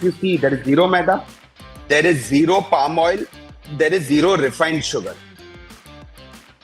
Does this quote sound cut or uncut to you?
uncut